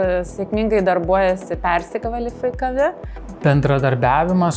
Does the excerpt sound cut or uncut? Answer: cut